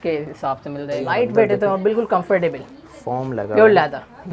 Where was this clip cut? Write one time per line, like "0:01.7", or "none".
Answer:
0:01.0